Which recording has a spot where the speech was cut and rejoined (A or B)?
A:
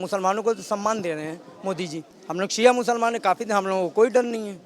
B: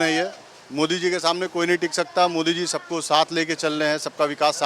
A